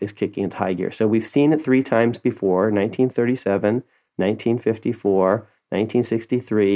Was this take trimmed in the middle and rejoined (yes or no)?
no